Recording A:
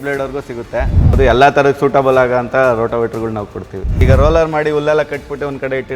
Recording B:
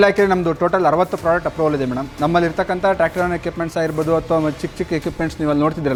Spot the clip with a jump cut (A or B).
A